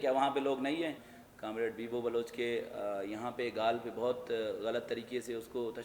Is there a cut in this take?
yes; 1 cut; at 1.1 s

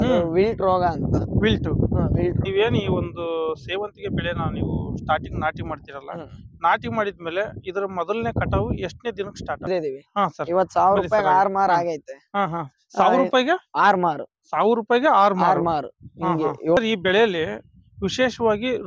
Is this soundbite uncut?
no; 3 cuts; at 2.4 s, 9.7 s, 16.8 s

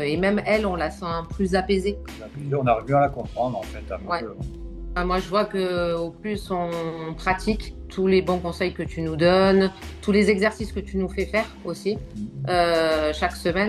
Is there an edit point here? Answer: yes; 2 cuts; at 5.0 s, 7.9 s

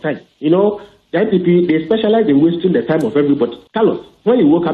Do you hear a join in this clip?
yes; 1 cut; at 3.6 s

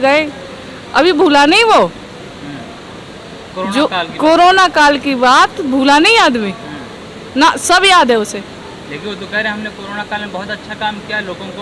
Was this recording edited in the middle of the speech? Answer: no; 0 cuts

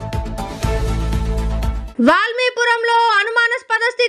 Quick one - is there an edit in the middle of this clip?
yes; 1 cut; at 1.8 s

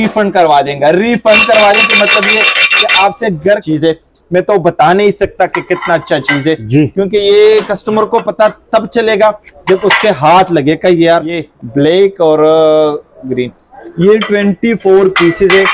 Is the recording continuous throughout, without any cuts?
no; 2 cuts; at 3.7 s, 11.4 s

